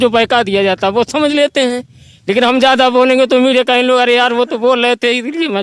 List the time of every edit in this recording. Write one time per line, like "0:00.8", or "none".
none